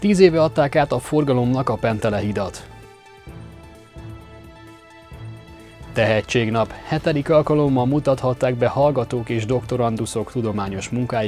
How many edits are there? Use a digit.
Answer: 2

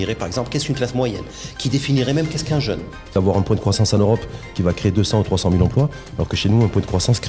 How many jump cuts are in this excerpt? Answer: 1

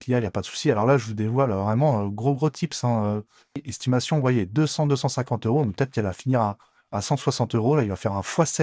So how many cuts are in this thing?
1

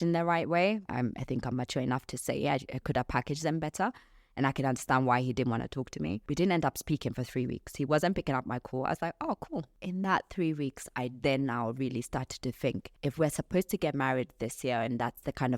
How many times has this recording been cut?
4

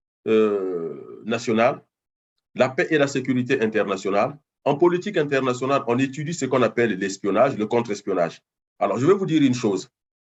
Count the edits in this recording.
0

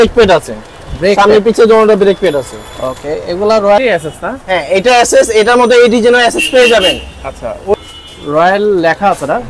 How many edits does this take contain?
2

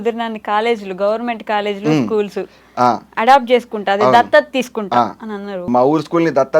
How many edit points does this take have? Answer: 1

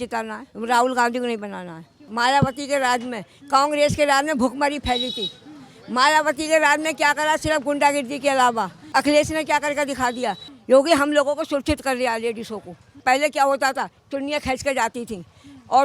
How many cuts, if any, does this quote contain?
4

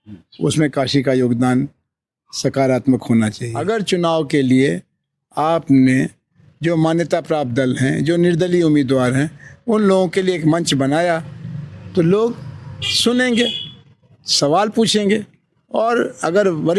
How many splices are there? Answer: 1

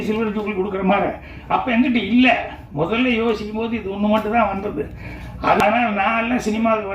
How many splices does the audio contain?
1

